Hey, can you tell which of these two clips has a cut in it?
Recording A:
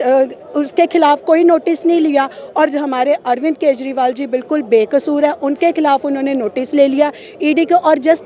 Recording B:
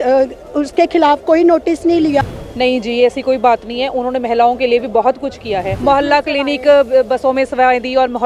B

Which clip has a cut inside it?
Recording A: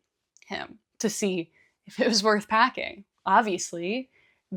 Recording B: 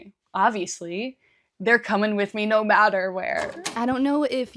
B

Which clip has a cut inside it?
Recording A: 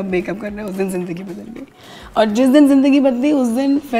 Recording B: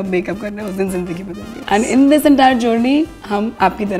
B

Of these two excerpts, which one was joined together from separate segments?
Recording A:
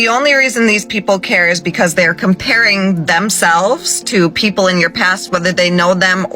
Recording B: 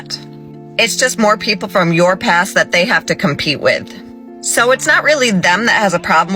B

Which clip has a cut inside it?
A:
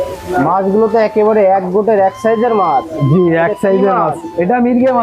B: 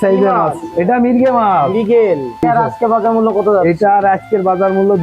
B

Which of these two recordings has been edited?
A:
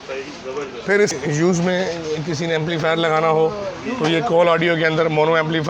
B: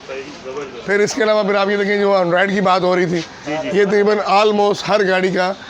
A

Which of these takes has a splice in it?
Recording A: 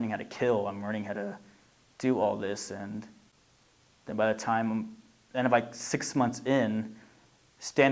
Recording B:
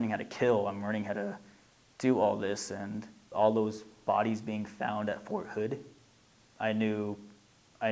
B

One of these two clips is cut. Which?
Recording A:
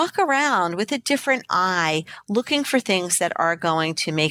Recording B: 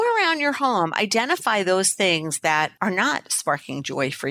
B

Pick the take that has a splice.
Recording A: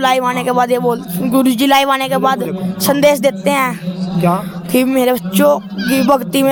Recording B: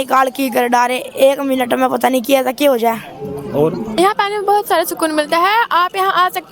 B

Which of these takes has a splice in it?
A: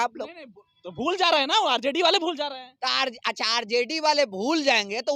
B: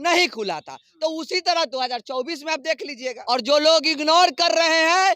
B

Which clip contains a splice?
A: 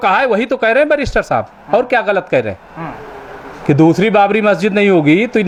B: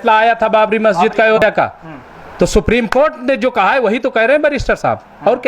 B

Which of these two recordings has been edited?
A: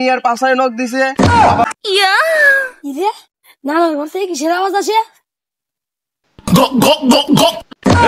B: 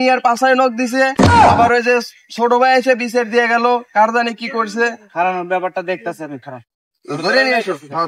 A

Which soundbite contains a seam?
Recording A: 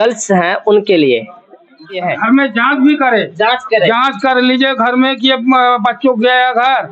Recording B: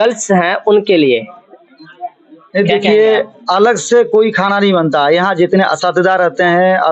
A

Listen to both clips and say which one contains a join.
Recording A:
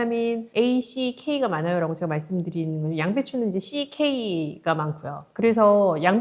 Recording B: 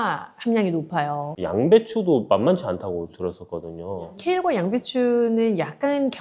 B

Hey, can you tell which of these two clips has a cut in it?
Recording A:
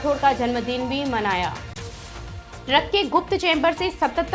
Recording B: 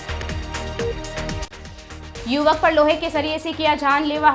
B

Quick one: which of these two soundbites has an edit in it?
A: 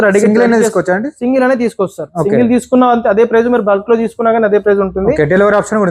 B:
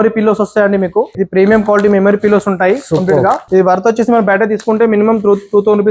B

